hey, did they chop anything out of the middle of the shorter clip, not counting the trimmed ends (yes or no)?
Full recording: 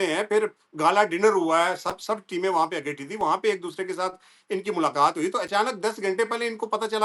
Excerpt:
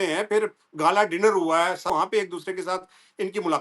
yes